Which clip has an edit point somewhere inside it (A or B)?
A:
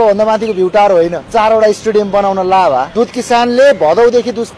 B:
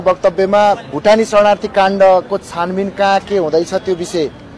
A